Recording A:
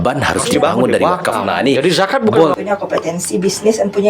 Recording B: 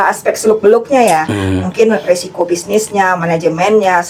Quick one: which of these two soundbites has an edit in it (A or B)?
A